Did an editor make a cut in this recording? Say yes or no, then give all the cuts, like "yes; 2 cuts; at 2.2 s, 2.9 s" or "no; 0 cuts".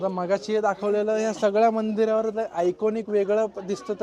no; 0 cuts